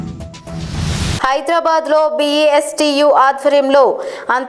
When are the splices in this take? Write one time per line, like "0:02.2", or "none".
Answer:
0:01.2